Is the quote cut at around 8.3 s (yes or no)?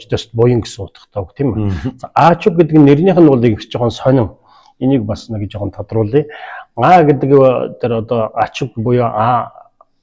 no